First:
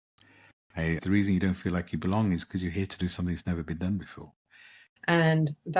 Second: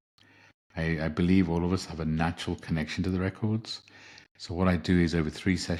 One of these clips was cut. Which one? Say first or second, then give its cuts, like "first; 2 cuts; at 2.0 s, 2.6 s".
first; 2 cuts; at 1.0 s, 4.8 s